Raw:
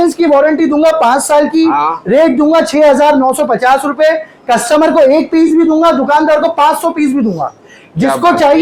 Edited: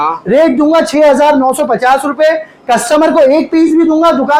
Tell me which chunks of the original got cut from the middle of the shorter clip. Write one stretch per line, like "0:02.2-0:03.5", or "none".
none